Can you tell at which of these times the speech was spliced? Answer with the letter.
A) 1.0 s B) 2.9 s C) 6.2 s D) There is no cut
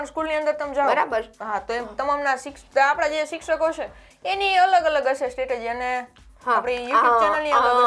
D